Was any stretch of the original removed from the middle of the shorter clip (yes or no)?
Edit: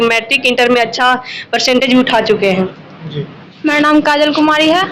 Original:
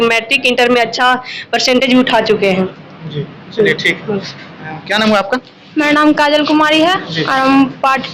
yes